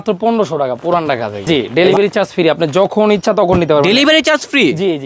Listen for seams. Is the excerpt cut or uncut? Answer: cut